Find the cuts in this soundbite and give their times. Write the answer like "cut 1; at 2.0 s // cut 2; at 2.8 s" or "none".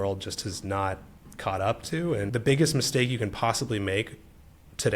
cut 1; at 2.3 s